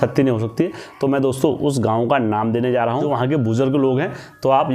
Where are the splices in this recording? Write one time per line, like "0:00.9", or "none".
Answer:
0:03.1